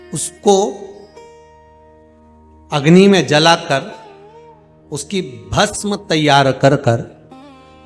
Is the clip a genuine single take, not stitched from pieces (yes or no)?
no